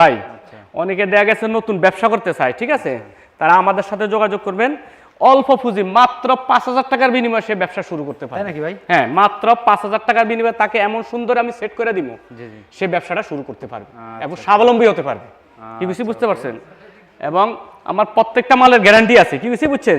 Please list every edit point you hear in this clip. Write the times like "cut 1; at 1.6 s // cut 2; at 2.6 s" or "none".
none